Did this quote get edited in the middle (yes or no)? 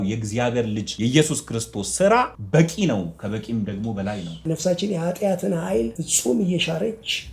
yes